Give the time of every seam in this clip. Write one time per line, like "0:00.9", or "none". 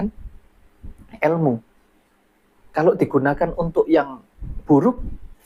none

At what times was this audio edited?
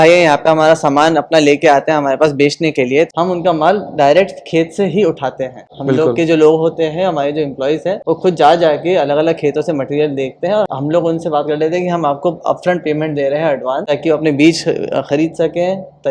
0:03.1
0:10.7

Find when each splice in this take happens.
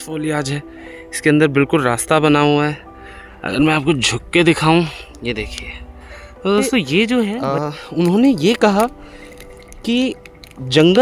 0:07.1

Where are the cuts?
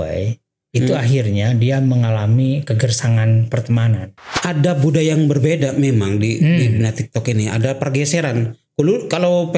0:04.2

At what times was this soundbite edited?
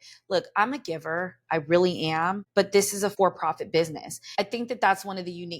0:02.8
0:04.3

